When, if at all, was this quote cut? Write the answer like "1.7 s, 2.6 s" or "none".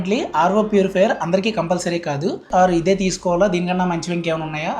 2.5 s